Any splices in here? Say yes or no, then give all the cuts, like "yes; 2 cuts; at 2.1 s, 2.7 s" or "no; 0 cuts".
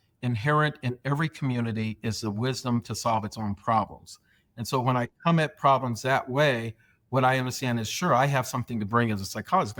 no; 0 cuts